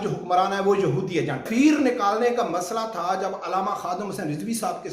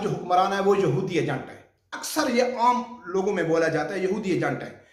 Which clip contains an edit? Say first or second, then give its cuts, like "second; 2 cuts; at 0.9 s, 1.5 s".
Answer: first; 1 cut; at 1.5 s